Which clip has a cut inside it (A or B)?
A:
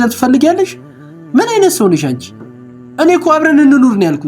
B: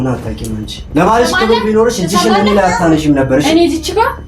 A